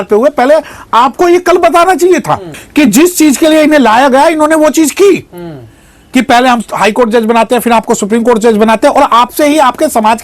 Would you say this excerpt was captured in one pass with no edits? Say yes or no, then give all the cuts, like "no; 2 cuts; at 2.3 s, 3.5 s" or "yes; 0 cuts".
no; 1 cut; at 2.5 s